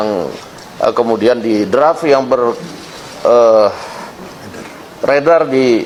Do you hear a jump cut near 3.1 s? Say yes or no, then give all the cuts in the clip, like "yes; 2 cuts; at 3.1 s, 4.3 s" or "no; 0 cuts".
no; 0 cuts